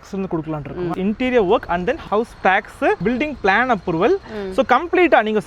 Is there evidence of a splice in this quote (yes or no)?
yes